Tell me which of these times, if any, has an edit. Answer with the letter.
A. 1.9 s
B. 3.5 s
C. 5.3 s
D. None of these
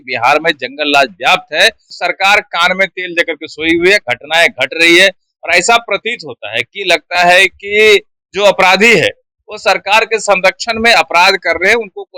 A